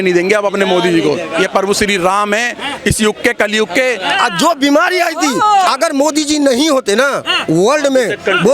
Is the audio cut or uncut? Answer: cut